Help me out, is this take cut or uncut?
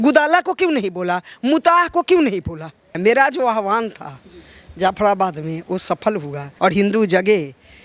cut